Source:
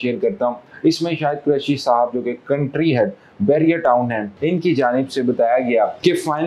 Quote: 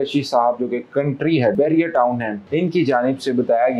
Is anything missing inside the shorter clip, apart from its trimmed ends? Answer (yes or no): yes